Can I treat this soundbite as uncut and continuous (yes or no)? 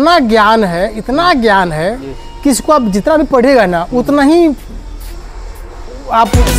yes